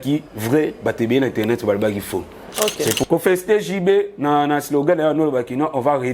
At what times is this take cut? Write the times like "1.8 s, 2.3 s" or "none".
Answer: 3.0 s